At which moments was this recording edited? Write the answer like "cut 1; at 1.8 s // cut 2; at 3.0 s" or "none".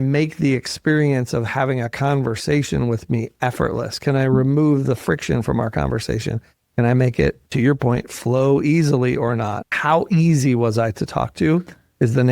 cut 1; at 9.7 s